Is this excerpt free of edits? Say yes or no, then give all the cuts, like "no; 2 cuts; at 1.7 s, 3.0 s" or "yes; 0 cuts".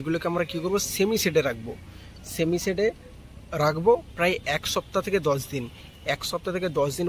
yes; 0 cuts